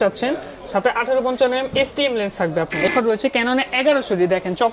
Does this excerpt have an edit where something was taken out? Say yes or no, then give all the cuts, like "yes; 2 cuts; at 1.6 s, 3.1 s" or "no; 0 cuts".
yes; 1 cut; at 2.9 s